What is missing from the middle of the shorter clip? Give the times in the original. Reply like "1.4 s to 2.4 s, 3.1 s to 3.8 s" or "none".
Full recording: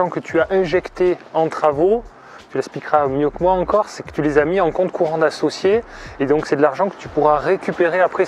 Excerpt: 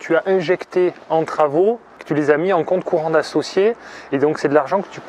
2.2 s to 4.0 s